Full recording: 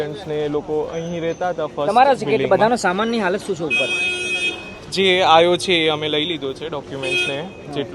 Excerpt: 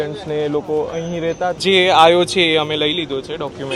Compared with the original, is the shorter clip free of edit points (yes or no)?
no